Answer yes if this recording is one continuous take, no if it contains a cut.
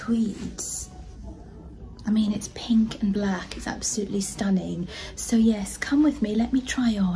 yes